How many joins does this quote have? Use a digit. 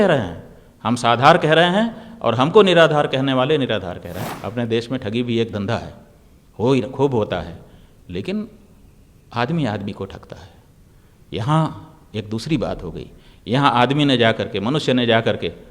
1